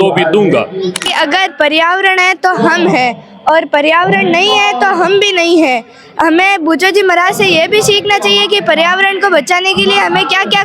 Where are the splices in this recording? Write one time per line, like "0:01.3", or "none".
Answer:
0:01.0